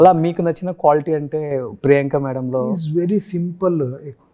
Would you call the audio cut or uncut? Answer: uncut